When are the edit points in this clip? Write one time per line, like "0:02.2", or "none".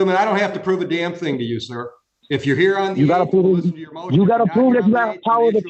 none